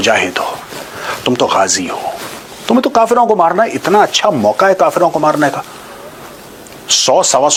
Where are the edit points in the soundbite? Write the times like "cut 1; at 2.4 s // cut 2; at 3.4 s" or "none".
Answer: none

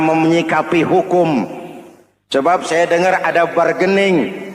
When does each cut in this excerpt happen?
none

